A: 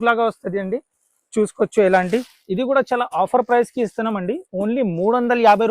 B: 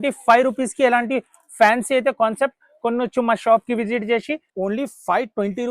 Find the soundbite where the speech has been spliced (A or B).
B